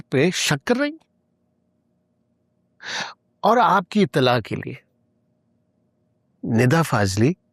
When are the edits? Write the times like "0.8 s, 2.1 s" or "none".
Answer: none